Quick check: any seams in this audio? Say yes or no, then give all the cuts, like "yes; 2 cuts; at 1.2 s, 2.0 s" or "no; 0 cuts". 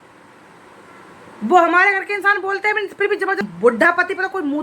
yes; 1 cut; at 3.4 s